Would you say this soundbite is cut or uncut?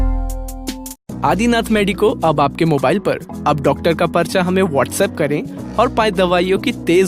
uncut